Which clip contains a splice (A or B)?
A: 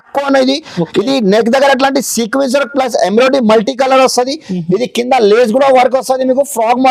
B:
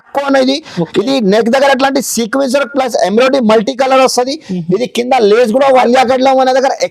B